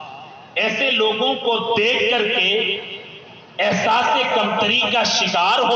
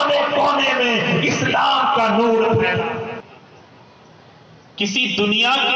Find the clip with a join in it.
second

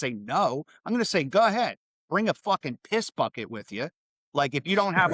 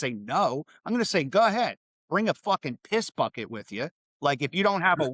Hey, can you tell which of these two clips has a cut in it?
second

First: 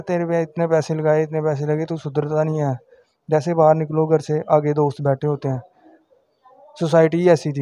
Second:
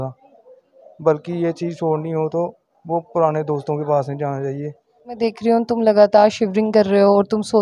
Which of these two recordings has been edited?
second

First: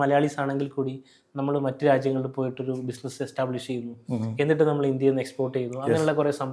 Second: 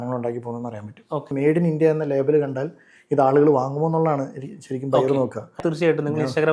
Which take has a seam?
second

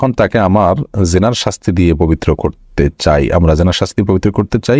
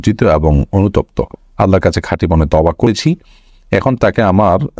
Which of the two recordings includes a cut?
second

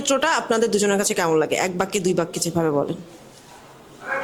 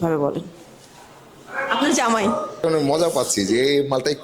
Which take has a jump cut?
second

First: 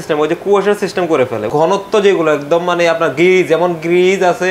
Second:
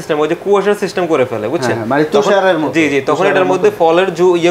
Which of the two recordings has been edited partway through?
first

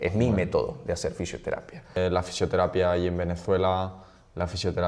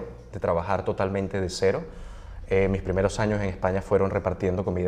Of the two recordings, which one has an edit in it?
first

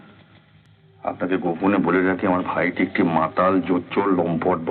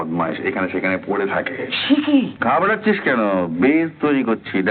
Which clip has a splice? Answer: second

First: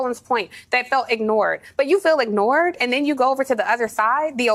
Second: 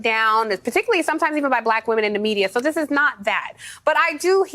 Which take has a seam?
second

